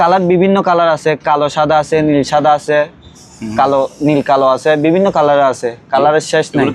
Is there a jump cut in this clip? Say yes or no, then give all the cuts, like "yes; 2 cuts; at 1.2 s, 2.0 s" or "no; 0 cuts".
no; 0 cuts